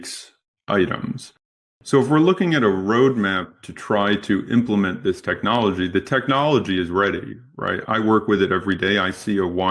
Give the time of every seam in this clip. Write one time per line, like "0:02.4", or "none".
0:07.8